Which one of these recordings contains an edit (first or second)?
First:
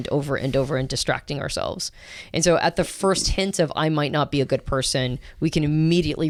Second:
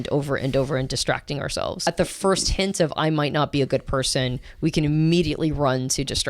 second